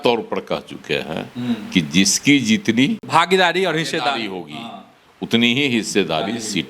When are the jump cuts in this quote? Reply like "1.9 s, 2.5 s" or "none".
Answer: 3.1 s